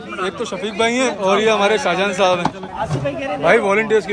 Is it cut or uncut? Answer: cut